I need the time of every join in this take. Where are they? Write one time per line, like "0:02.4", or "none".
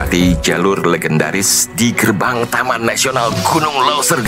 none